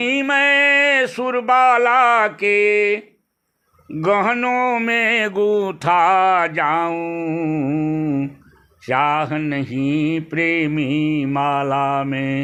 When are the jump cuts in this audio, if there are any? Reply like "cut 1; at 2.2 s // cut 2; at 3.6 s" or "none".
none

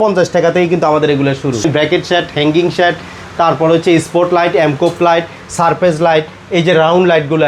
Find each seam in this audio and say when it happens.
cut 1; at 1.6 s

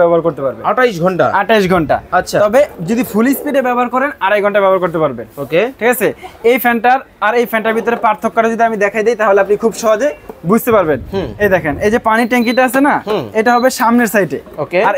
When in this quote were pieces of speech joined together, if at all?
none

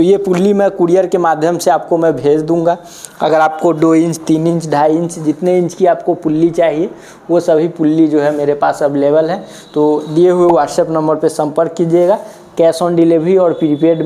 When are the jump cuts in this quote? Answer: none

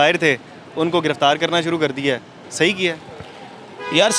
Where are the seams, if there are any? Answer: none

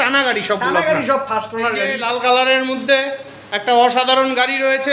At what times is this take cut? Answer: cut 1; at 1.9 s

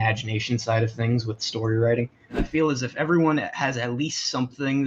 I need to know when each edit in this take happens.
cut 1; at 2.4 s

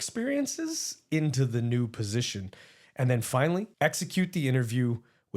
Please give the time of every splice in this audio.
cut 1; at 3.7 s

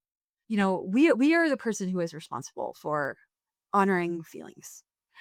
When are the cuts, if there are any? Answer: none

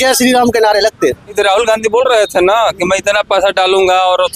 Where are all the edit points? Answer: cut 1; at 1.4 s

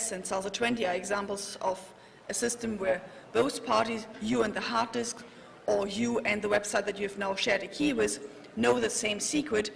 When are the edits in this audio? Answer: cut 1; at 1.5 s

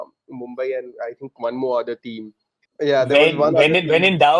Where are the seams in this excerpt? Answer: cut 1; at 2.7 s

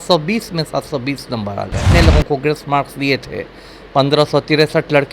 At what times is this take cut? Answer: cut 1; at 1.8 s

